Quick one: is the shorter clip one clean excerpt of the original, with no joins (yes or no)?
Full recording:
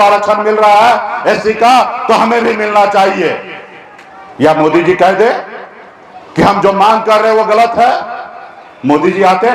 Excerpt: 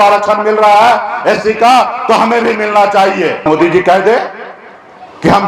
no